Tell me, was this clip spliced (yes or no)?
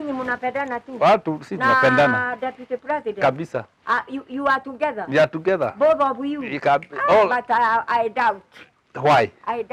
no